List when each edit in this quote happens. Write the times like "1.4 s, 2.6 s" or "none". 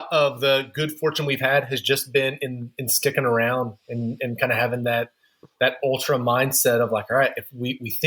none